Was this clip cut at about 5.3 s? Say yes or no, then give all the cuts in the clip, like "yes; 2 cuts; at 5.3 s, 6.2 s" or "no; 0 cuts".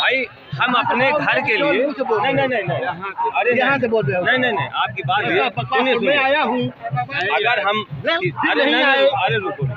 yes; 1 cut; at 5.3 s